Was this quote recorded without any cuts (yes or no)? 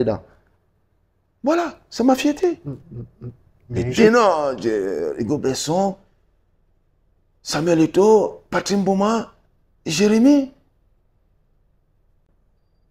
no